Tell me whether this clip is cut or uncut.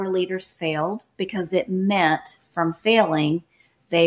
uncut